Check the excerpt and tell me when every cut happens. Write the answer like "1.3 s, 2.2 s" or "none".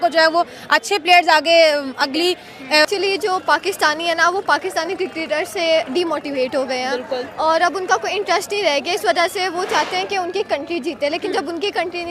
2.9 s